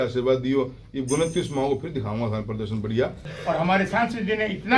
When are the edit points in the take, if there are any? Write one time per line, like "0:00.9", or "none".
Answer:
0:03.3